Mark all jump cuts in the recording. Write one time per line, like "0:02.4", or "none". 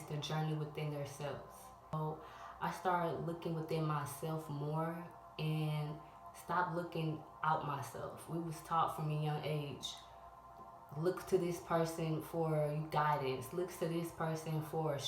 0:01.9